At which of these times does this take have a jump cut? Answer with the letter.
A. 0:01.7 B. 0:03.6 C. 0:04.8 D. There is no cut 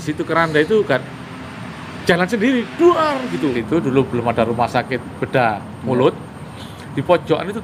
B